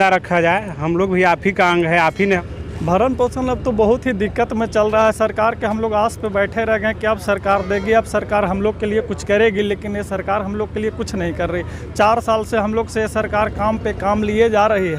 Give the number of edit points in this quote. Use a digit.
1